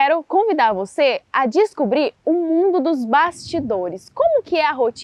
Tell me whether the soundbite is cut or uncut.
uncut